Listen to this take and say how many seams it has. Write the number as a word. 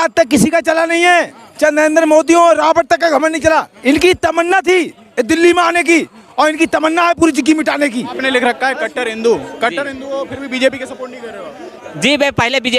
two